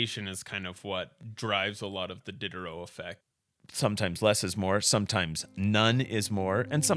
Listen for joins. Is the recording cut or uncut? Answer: cut